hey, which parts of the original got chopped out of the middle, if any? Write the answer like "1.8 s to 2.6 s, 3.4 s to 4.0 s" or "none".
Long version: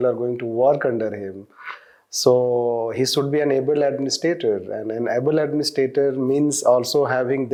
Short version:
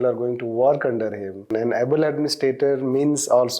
1.4 s to 4.8 s